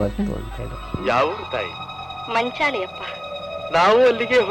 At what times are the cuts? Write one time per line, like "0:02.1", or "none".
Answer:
none